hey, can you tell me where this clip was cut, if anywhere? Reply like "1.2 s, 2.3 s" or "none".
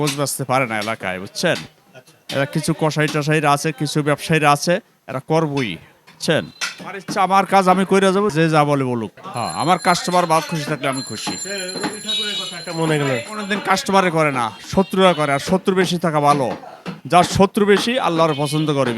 none